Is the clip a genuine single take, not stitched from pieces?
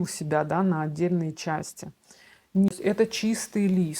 no; 1 cut; at 2.7 s

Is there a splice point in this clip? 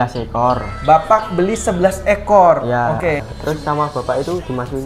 yes; 1 cut; at 3.3 s

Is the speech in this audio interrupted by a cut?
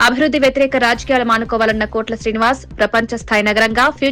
no; 0 cuts

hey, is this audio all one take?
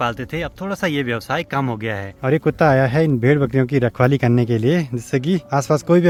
yes; 0 cuts

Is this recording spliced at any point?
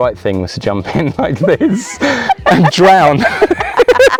no; 0 cuts

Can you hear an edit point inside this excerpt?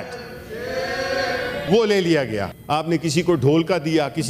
yes; 2 cuts; at 1.7 s, 2.5 s

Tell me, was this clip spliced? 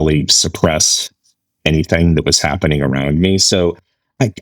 no; 0 cuts

